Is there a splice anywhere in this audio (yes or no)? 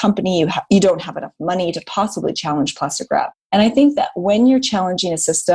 yes